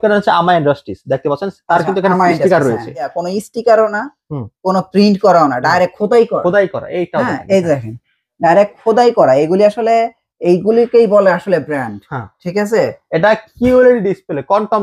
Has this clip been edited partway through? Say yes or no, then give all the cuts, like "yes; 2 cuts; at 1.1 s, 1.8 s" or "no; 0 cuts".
yes; 1 cut; at 3.2 s